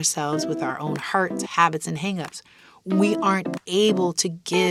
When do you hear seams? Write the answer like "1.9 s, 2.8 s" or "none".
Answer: none